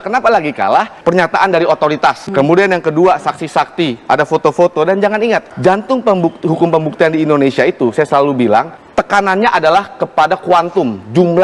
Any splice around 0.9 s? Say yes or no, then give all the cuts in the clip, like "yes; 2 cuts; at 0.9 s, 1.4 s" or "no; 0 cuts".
yes; 4 cuts; at 0.9 s, 2.2 s, 5.5 s, 8.8 s